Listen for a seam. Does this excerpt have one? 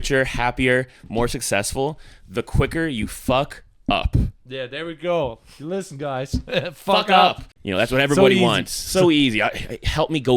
yes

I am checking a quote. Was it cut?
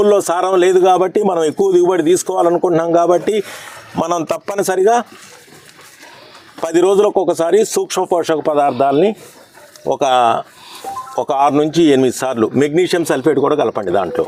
no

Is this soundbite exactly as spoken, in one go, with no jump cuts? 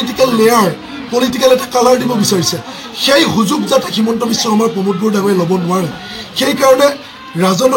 yes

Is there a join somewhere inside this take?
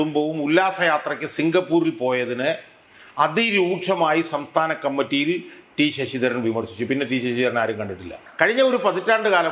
yes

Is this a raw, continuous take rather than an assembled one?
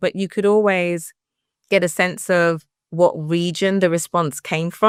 yes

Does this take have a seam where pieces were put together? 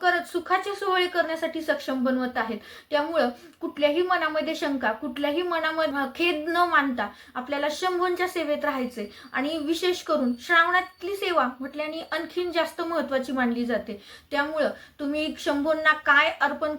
no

